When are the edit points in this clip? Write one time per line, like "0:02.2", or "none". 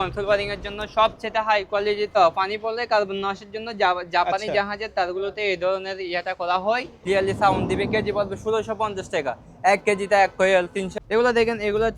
0:02.2
0:06.9
0:10.9